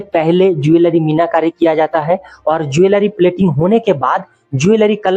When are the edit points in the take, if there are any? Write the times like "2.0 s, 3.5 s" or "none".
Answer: none